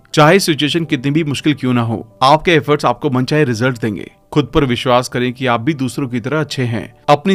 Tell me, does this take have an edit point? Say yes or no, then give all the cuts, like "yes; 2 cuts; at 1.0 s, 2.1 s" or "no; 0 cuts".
no; 0 cuts